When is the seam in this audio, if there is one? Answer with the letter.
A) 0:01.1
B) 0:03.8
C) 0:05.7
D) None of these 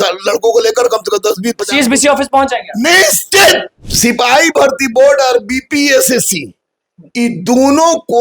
B